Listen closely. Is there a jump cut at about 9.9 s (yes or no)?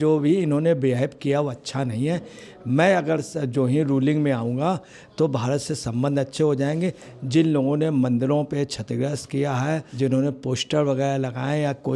yes